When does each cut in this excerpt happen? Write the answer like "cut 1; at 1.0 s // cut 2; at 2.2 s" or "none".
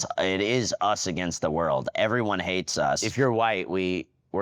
cut 1; at 3.1 s